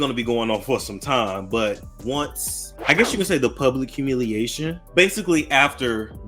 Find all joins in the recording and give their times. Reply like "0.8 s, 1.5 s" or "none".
none